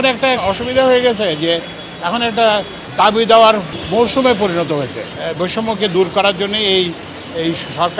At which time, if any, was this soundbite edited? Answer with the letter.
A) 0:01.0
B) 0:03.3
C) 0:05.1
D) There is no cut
C